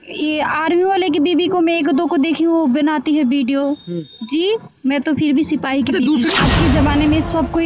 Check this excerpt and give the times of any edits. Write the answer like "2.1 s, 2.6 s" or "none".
6.4 s